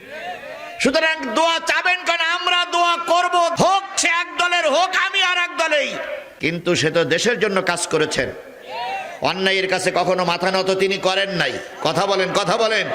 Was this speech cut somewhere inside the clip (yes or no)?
yes